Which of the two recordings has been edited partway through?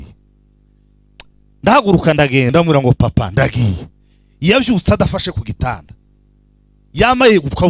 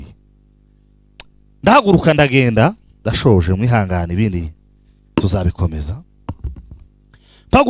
first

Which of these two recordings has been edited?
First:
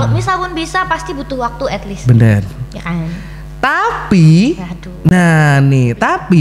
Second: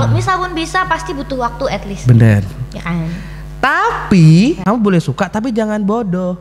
second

